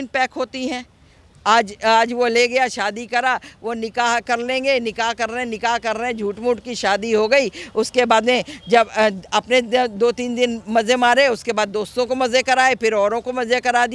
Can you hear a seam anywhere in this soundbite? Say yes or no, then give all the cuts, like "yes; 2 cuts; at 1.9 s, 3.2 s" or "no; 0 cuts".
no; 0 cuts